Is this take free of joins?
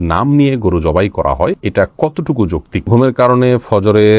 no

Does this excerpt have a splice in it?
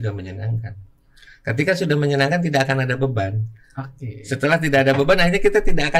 no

